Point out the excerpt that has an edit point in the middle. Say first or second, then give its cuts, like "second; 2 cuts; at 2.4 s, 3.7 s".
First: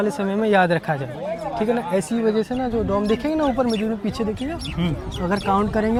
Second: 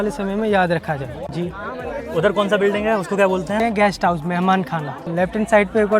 second; 3 cuts; at 1.2 s, 3.6 s, 5.0 s